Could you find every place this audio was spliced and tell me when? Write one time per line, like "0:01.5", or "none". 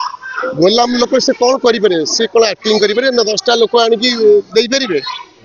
none